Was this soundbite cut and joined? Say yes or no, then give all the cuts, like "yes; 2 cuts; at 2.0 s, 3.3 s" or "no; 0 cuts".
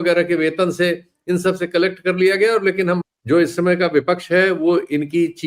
yes; 1 cut; at 3.0 s